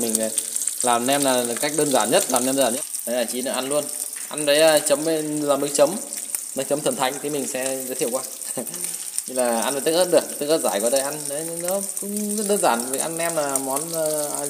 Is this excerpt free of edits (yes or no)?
no